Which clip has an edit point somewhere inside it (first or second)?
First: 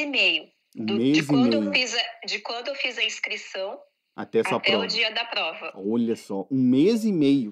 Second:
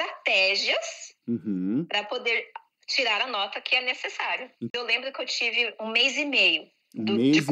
second